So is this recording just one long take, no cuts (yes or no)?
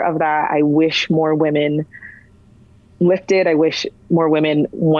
yes